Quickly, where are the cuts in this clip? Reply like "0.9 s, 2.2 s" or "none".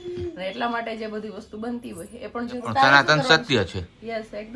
2.7 s